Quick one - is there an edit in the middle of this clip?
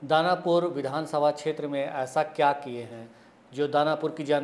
no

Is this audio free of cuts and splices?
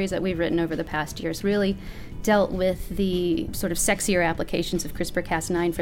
no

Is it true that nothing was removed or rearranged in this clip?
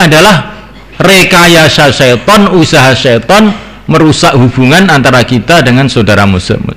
yes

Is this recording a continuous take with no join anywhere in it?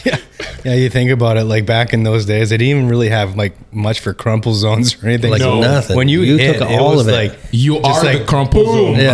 yes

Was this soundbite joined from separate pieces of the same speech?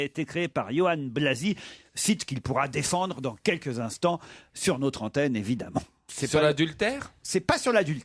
yes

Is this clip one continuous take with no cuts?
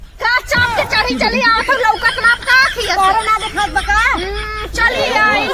yes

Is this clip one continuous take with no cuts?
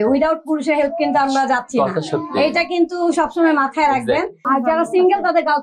no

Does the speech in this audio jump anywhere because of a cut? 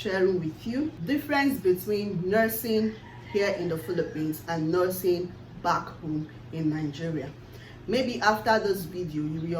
yes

